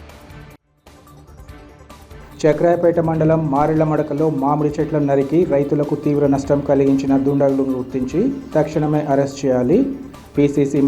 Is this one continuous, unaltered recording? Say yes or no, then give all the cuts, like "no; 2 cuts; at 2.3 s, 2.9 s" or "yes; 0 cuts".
yes; 0 cuts